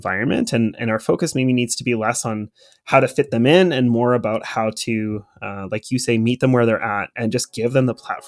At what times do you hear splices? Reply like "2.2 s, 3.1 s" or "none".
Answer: 7.1 s

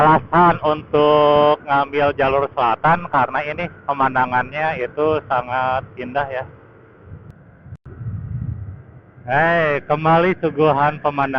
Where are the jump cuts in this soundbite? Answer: 7.1 s

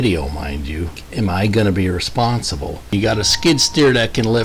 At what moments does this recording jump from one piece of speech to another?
1.0 s, 2.9 s

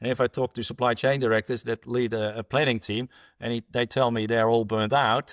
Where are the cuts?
none

